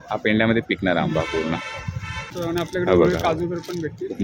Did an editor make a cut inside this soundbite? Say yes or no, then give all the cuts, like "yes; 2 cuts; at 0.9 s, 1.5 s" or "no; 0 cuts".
yes; 1 cut; at 2.3 s